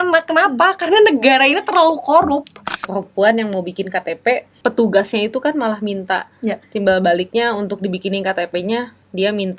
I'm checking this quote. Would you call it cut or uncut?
cut